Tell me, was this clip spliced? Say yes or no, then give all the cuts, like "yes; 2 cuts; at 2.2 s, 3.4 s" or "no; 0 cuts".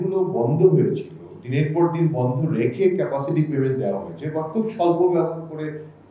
no; 0 cuts